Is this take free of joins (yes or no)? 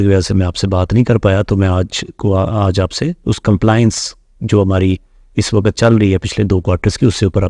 yes